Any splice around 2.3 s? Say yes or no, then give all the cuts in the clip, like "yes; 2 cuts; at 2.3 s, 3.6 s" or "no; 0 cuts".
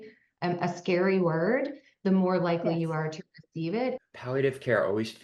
no; 1 cut; at 4.0 s